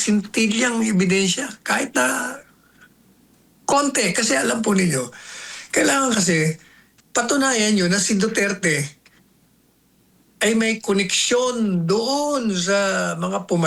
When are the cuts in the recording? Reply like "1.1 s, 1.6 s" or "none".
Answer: none